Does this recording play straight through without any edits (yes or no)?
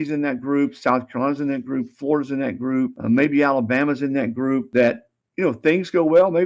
no